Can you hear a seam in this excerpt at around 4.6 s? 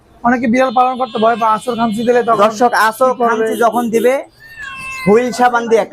no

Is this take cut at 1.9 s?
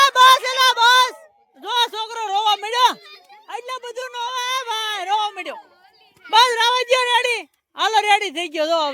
no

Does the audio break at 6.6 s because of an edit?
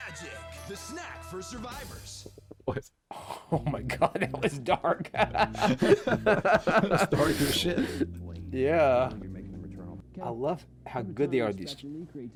no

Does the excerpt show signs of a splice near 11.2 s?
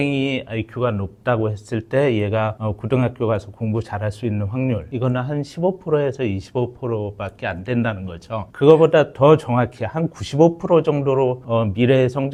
no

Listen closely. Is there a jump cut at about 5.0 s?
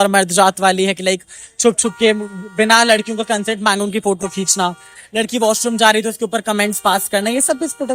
no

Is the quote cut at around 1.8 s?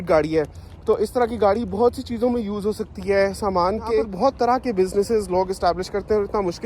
no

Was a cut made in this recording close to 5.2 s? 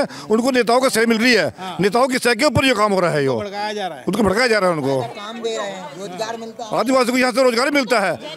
no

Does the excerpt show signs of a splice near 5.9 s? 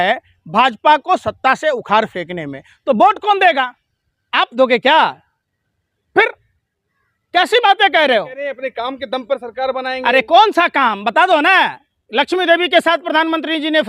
no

